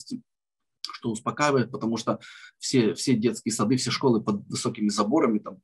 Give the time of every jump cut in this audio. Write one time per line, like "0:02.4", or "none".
none